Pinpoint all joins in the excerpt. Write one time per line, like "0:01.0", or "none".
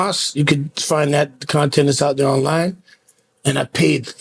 none

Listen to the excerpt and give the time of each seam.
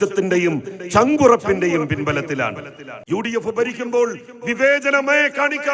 0:02.9

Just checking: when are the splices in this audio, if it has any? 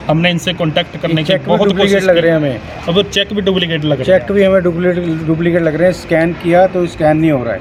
none

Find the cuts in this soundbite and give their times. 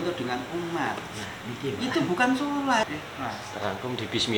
0:02.9

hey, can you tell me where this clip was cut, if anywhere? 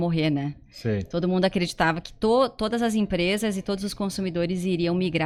none

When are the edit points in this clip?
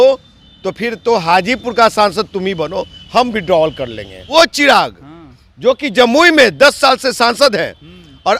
0:04.2

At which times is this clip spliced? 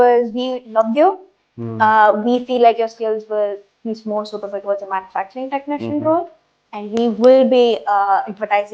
none

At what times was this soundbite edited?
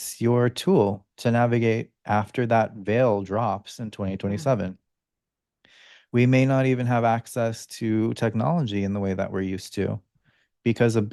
none

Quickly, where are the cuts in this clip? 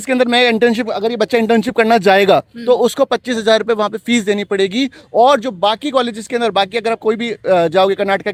none

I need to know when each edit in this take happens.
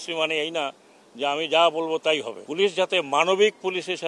0:02.4

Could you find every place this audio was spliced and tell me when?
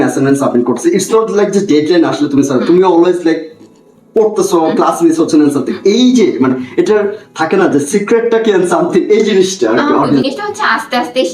0:10.2

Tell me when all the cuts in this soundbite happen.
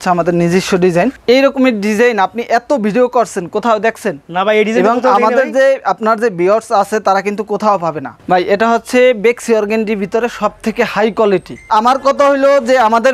0:01.2
0:08.2
0:11.6

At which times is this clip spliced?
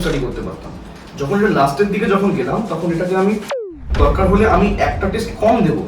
0:03.8

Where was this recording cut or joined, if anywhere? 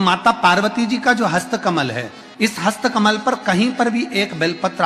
none

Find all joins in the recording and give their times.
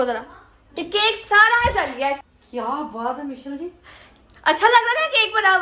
0:02.2

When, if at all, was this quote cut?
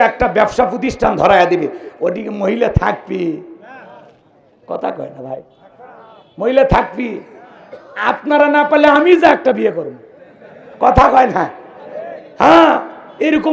none

